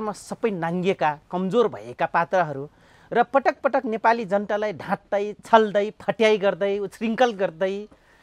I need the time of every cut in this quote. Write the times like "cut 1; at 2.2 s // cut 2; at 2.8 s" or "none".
none